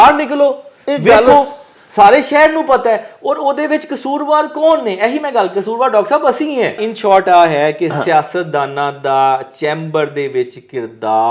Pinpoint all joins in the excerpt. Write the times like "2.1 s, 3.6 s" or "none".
6.8 s